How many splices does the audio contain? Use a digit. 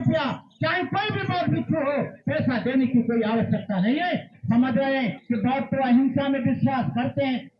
1